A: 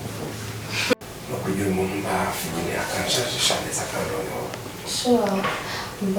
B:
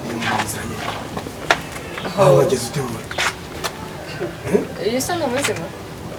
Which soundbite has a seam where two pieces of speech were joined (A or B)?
A